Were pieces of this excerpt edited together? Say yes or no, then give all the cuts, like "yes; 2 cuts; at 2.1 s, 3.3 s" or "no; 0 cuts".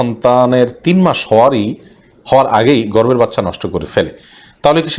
no; 0 cuts